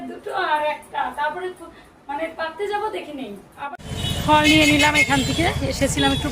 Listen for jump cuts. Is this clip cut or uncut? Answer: cut